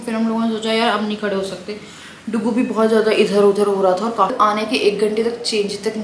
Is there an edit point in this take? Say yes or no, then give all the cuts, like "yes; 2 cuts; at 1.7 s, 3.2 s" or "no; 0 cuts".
yes; 1 cut; at 4.3 s